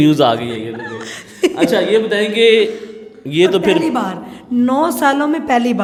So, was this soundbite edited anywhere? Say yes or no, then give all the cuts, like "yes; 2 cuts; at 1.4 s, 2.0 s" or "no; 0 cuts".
no; 0 cuts